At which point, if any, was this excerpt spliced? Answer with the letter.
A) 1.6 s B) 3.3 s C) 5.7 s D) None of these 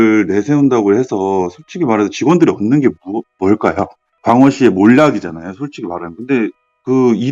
D